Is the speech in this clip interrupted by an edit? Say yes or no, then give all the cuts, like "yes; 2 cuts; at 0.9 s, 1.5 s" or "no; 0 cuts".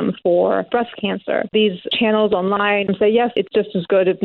yes; 1 cut; at 3.3 s